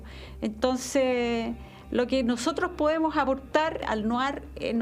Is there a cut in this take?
yes; 1 cut; at 3.9 s

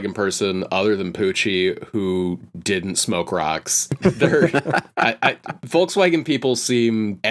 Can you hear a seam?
no; 0 cuts

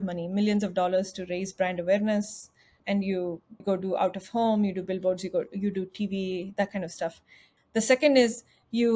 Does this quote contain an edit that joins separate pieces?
yes; 1 cut; at 7.5 s

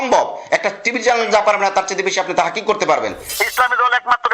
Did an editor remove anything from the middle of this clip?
yes; 1 cut; at 3.3 s

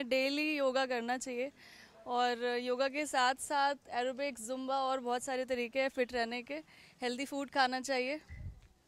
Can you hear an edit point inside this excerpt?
no; 0 cuts

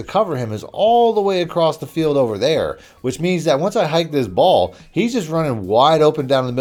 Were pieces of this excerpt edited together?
no; 0 cuts

